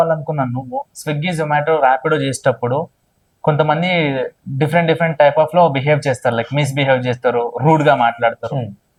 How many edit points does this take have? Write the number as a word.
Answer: zero